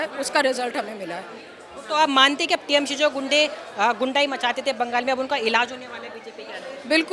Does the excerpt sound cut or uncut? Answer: uncut